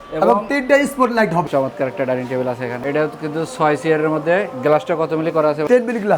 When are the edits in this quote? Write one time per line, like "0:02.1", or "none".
0:01.5